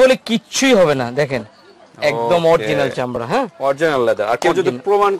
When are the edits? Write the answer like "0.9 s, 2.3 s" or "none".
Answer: none